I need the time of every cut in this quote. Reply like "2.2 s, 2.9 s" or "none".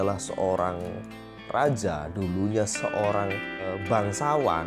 3.7 s